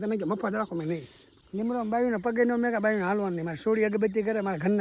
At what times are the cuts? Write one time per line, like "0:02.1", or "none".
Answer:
0:01.3

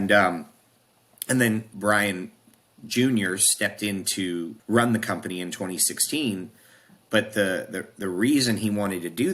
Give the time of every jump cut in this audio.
0:01.7
0:04.6

